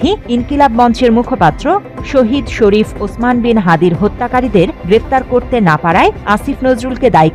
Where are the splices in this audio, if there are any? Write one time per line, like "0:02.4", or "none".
none

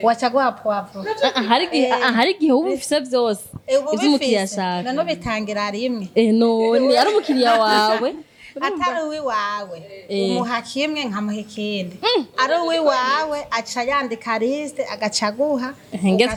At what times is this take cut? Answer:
none

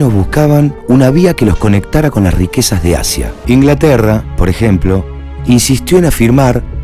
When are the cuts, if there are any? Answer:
none

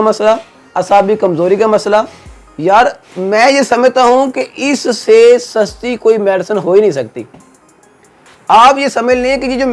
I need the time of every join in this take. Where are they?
none

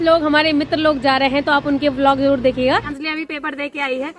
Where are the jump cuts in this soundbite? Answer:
0:02.9

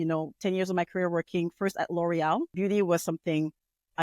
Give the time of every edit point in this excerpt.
0:02.5

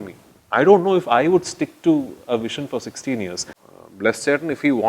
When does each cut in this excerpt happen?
0:03.5

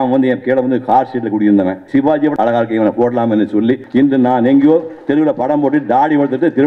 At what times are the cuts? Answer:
0:02.2
0:03.8

